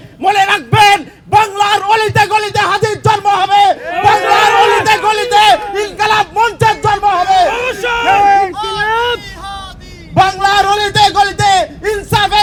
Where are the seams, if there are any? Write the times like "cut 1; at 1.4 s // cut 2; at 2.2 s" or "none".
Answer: none